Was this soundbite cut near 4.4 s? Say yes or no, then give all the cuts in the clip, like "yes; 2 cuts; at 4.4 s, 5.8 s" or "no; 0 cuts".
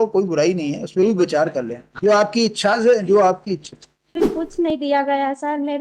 yes; 1 cut; at 4.4 s